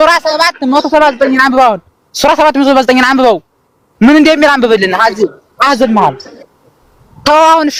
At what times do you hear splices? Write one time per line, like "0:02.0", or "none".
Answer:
none

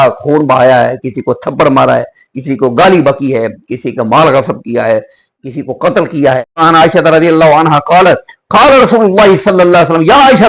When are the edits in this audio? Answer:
0:06.6

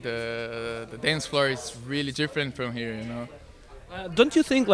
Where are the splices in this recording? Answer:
none

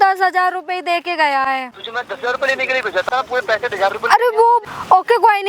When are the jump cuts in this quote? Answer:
0:01.8
0:03.1
0:04.6

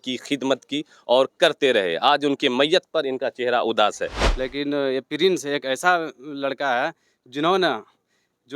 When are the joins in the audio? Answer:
0:04.2

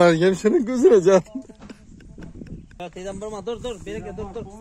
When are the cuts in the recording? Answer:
0:02.8

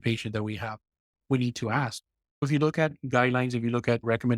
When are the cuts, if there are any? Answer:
0:02.5

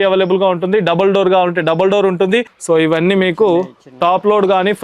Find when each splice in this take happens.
0:02.5

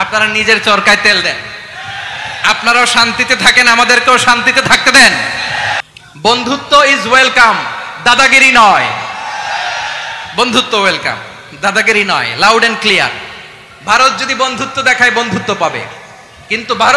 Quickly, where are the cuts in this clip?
0:05.8

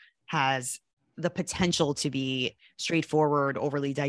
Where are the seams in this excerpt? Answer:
0:02.6

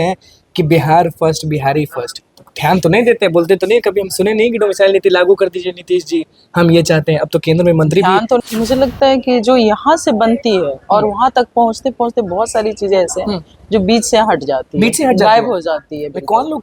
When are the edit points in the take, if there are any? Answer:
0:08.4

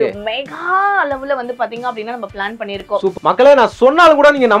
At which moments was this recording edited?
0:03.1

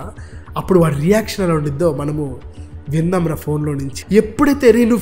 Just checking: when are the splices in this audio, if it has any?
0:03.9

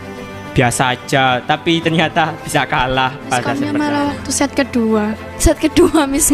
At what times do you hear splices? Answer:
0:03.5

